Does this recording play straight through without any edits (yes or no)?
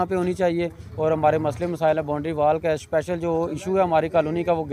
yes